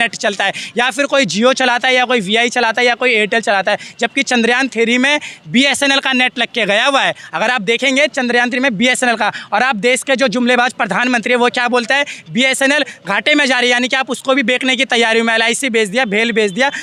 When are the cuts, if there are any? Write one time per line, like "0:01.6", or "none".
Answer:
none

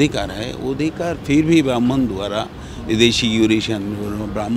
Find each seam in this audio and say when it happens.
none

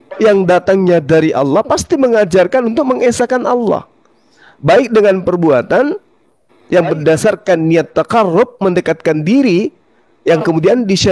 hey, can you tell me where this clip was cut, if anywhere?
none

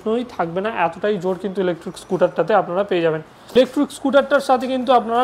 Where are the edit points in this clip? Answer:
0:03.3

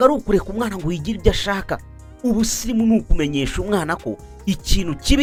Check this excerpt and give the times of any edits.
none

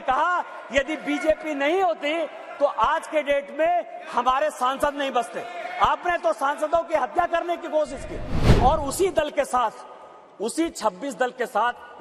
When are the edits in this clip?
none

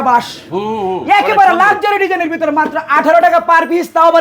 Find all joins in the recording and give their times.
none

